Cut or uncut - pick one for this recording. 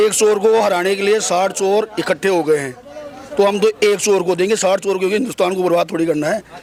uncut